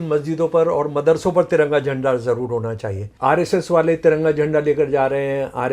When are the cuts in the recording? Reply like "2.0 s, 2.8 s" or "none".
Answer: 3.1 s